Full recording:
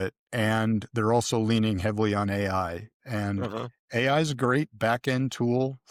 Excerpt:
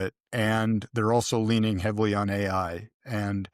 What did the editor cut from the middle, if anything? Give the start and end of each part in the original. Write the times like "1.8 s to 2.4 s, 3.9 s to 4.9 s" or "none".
none